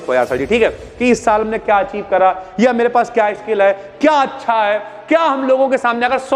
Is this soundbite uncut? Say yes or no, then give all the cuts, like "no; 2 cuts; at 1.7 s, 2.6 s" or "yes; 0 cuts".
yes; 0 cuts